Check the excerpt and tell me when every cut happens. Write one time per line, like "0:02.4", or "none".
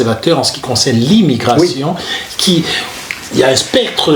0:03.1